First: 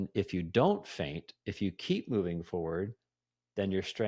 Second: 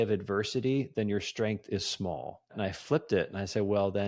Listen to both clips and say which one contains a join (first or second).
second